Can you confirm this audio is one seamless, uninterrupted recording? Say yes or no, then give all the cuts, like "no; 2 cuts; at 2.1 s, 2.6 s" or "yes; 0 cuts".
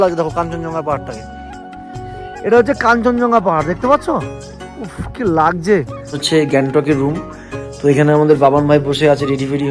no; 1 cut; at 6.2 s